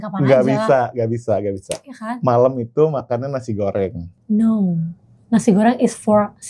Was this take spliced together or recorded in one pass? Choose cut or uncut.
cut